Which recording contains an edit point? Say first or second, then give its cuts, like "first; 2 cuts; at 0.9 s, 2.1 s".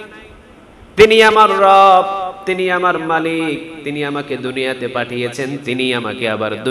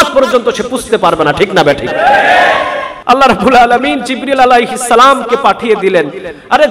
second; 1 cut; at 2.9 s